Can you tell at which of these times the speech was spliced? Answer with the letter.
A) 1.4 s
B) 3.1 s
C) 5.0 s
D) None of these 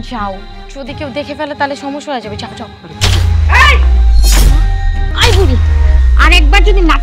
C